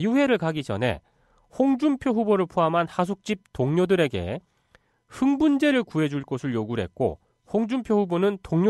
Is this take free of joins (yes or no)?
yes